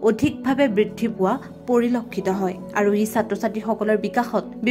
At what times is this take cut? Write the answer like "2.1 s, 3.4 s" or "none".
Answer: none